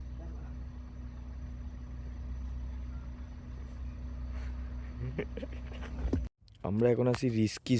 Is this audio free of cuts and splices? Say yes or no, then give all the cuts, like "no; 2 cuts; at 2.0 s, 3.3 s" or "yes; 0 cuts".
no; 1 cut; at 6.3 s